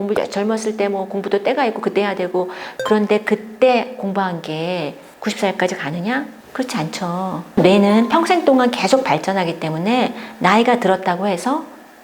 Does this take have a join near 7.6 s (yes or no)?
yes